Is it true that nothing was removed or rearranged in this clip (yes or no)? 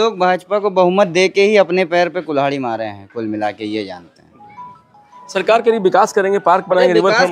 yes